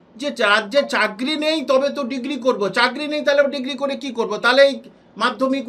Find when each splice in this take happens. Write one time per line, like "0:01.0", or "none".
none